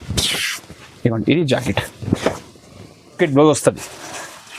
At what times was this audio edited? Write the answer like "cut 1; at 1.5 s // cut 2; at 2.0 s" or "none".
cut 1; at 3.2 s